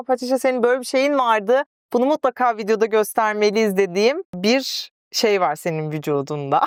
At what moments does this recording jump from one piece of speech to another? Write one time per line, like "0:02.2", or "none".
none